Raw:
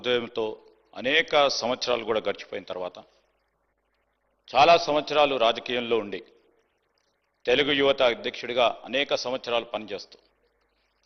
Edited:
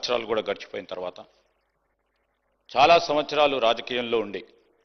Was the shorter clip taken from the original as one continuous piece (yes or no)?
yes